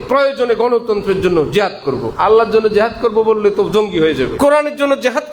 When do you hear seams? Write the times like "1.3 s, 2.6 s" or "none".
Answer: 2.1 s, 4.3 s